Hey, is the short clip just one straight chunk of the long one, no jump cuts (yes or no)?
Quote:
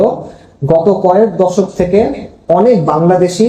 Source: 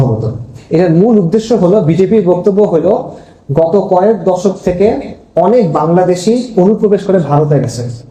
yes